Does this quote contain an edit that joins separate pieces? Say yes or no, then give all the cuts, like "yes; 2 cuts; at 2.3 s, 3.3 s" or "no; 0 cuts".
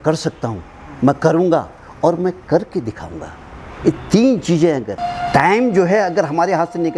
yes; 1 cut; at 5.0 s